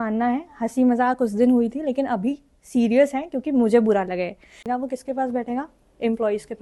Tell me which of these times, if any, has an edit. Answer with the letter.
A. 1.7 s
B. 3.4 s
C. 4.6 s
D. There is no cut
C